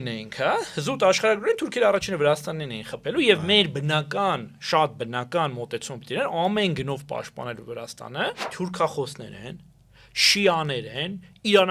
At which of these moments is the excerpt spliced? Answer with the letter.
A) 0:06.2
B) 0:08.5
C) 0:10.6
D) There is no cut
B